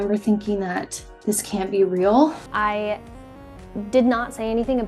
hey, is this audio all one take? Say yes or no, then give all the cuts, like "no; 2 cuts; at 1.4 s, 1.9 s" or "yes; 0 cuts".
no; 1 cut; at 2.4 s